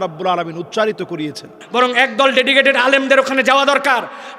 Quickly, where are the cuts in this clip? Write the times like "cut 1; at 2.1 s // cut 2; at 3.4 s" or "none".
cut 1; at 1.6 s